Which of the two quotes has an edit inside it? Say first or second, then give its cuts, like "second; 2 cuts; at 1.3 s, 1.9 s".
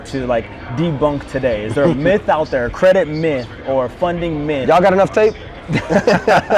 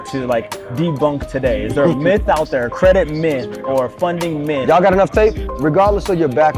second; 1 cut; at 5.5 s